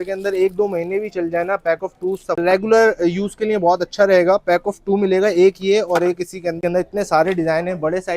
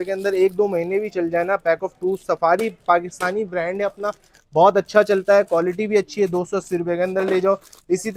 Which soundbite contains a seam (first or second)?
first